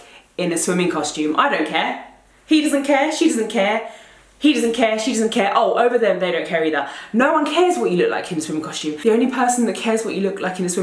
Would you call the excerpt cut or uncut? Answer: uncut